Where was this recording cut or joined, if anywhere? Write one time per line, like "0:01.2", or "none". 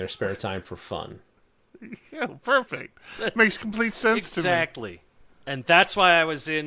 0:05.6